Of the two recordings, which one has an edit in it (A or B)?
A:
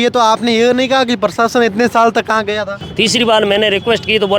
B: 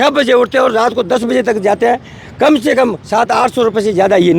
A